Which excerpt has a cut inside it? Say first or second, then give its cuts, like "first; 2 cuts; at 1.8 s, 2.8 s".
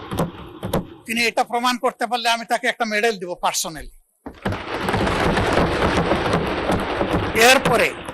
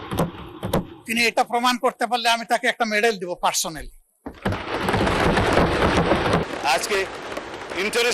second; 1 cut; at 6.5 s